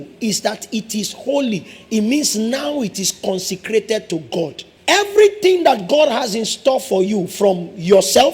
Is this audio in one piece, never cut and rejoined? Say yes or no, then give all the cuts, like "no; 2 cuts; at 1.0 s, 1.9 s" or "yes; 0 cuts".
no; 1 cut; at 4.7 s